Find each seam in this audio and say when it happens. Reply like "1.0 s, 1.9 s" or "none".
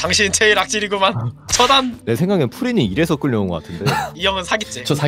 2.0 s, 4.1 s